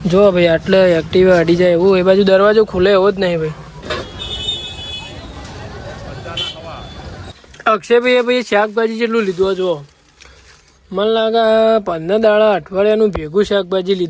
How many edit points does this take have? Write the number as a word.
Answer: two